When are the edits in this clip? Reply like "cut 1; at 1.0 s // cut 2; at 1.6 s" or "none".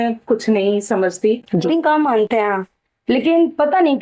cut 1; at 1.6 s